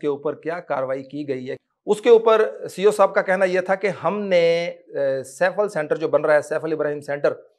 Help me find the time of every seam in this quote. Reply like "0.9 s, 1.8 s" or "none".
1.5 s